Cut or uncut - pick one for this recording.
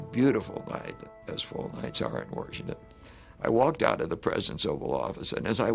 cut